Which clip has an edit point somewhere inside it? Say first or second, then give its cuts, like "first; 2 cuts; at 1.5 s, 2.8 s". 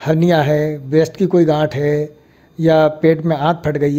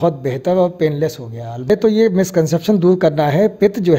second; 1 cut; at 1.7 s